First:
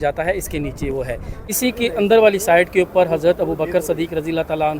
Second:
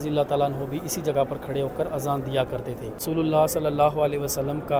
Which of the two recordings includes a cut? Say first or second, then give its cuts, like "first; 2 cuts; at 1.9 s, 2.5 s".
first; 1 cut; at 1.3 s